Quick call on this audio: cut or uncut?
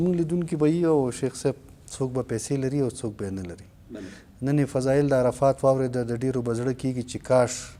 uncut